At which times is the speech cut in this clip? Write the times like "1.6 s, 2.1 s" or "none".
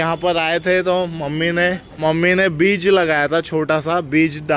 2.0 s